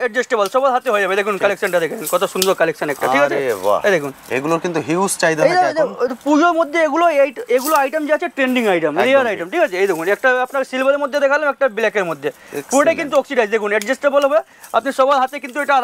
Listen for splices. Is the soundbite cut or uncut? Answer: uncut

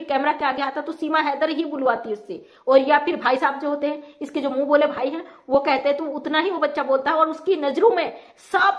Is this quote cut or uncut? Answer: uncut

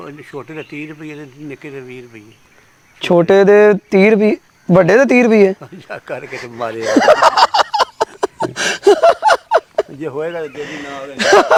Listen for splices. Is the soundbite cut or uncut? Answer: uncut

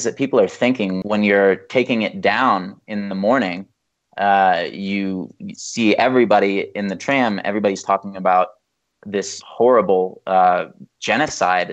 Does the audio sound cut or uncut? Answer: cut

